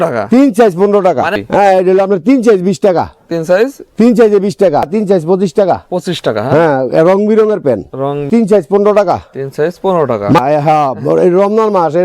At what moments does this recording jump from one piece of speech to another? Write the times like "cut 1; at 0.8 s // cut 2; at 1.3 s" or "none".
cut 1; at 1.4 s // cut 2; at 4.9 s // cut 3; at 8.3 s // cut 4; at 10.4 s